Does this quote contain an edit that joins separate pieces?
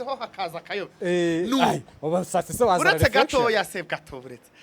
no; 0 cuts

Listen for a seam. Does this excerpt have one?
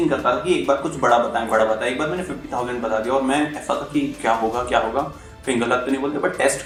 no; 0 cuts

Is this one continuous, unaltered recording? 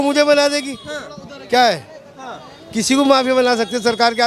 yes; 0 cuts

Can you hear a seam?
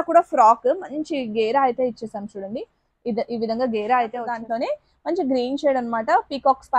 yes; 1 cut; at 4.4 s

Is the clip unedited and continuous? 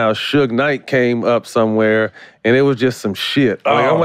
yes; 0 cuts

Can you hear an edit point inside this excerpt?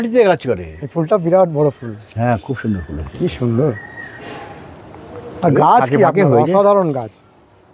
no; 0 cuts

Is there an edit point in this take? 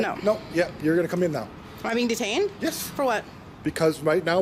no; 0 cuts

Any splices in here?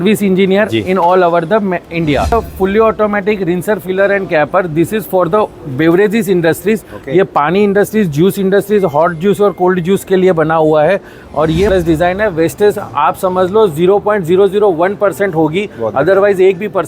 yes; 2 cuts; at 2.3 s, 11.7 s

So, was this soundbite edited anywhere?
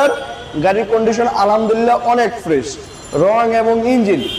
no; 0 cuts

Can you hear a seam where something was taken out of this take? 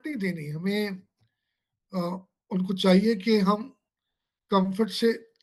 no; 0 cuts

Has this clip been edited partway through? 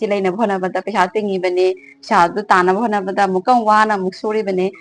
no; 0 cuts

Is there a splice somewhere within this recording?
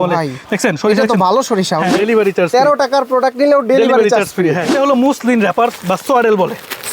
yes; 2 cuts; at 1.9 s, 4.7 s

